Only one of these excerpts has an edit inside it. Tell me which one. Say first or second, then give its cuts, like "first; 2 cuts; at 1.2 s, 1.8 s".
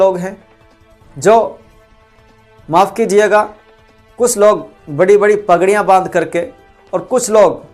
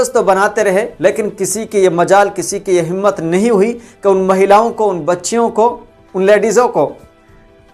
second; 1 cut; at 0.9 s